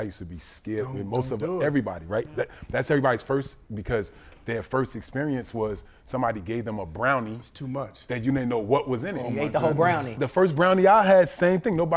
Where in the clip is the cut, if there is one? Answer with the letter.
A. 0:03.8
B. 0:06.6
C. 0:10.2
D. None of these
C